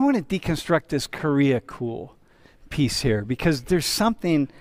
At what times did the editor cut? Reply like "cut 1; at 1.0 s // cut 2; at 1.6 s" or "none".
none